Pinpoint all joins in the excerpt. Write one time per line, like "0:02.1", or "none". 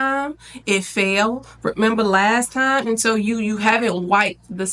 0:02.9